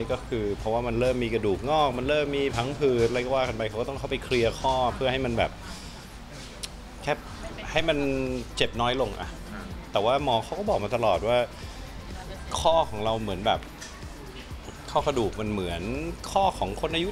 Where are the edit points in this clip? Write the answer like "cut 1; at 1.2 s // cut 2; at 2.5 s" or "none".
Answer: none